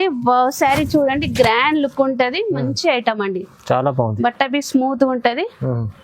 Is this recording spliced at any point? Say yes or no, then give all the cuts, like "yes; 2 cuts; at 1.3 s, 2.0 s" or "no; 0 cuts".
no; 0 cuts